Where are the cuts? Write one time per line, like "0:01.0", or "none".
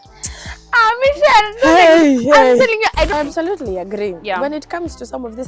0:03.1